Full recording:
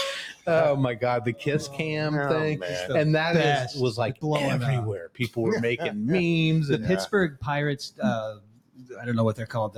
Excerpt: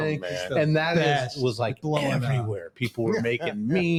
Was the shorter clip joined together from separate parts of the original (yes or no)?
no